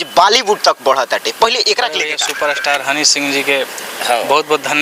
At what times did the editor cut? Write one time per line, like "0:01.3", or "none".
0:02.2